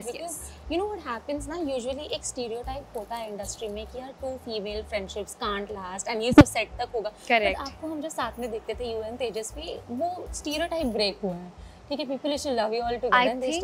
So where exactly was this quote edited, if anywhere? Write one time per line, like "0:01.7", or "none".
none